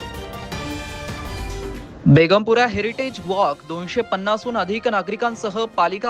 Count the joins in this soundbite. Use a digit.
1